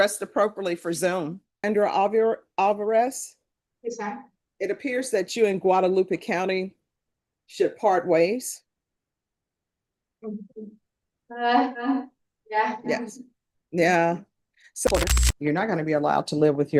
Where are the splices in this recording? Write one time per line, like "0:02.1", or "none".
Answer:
0:01.6
0:14.9